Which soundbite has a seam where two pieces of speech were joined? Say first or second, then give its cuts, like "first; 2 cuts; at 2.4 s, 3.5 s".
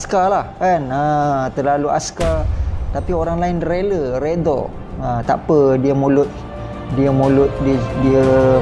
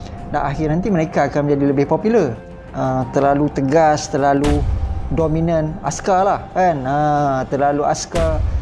second; 1 cut; at 2.4 s